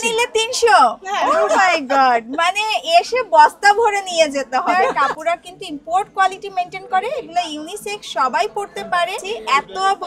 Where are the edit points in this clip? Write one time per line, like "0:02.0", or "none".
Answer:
0:01.2
0:04.7
0:09.2

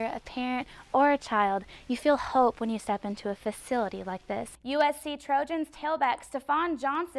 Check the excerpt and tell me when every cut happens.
0:04.5

